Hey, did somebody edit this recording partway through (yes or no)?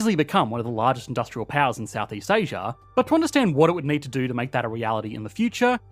no